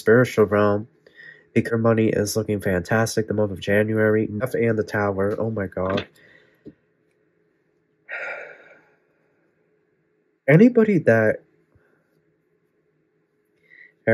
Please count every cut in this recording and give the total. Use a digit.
2